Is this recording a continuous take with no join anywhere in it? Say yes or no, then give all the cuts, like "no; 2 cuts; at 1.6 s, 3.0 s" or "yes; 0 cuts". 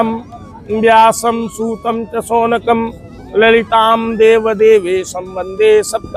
yes; 0 cuts